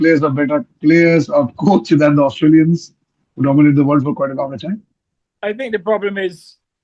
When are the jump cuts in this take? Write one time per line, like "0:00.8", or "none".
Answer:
0:05.3